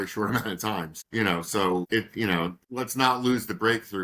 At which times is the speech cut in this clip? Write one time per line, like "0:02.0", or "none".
0:00.9
0:01.9
0:02.6